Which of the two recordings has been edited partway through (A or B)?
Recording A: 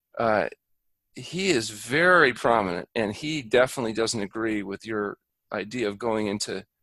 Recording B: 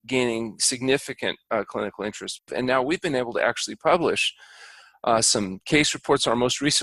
B